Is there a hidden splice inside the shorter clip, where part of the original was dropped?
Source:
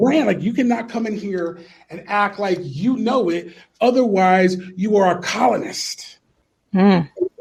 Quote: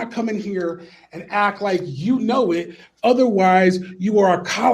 no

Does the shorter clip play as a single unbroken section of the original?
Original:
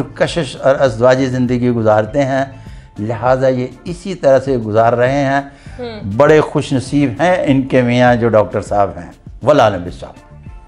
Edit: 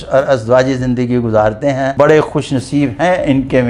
no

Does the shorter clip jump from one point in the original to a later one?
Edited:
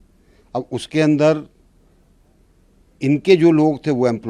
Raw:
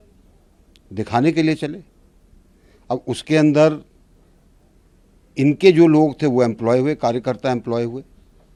no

